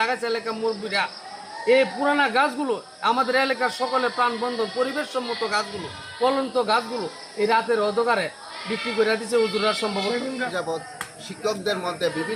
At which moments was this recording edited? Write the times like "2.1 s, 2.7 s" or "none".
10.5 s